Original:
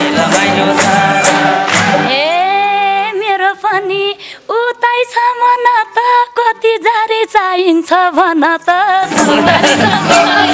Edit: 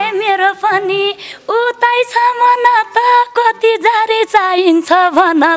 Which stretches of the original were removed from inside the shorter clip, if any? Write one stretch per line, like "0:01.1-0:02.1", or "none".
none